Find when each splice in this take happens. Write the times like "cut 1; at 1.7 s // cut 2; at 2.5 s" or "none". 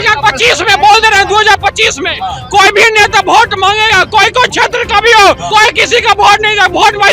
cut 1; at 5.4 s